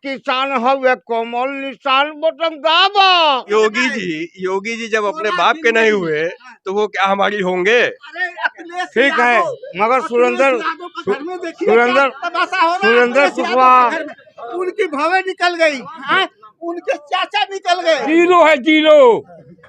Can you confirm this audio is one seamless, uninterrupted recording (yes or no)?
no